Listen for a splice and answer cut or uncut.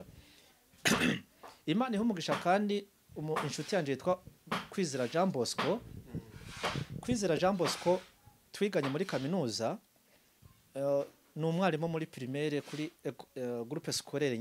uncut